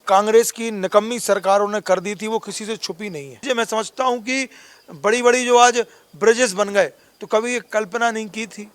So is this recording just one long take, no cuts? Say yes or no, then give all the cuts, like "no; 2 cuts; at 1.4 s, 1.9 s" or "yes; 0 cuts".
no; 1 cut; at 3.4 s